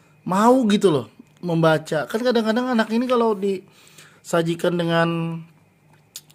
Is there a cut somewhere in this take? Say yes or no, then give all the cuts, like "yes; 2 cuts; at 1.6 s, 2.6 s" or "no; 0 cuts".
no; 0 cuts